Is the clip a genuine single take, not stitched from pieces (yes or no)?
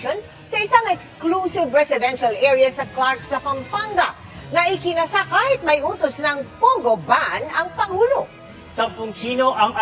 no